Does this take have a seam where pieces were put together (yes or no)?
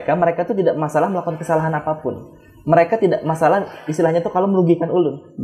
no